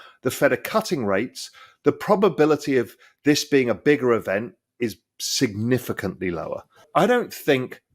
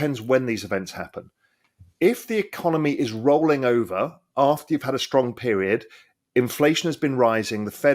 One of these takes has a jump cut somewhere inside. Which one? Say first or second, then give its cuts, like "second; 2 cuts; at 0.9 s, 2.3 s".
first; 1 cut; at 6.8 s